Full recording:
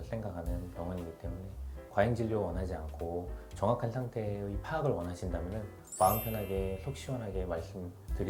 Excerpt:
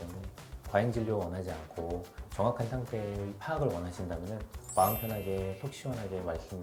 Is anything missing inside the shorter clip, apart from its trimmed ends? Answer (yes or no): no